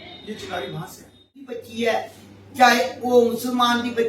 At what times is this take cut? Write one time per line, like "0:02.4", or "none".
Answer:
0:01.6